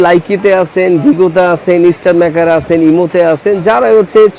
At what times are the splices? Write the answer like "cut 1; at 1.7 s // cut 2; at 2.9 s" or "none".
none